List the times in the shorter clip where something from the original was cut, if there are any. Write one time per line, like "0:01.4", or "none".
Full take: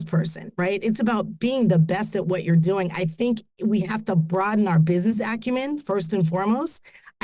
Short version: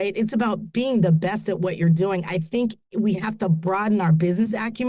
none